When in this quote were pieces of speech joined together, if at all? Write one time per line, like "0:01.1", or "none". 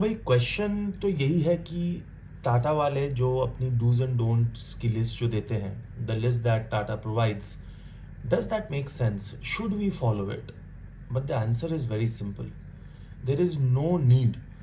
none

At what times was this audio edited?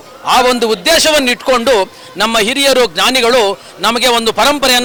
none

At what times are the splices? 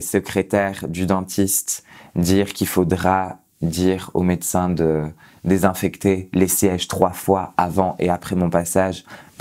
none

